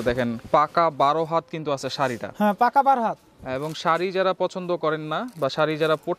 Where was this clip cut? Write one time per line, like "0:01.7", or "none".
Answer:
none